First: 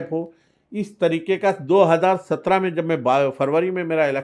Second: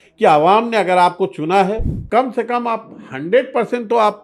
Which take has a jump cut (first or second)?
second